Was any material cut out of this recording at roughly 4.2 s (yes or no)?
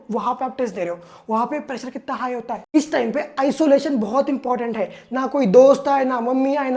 no